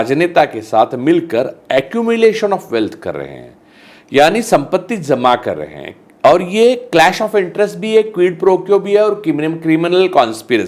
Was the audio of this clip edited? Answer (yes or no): no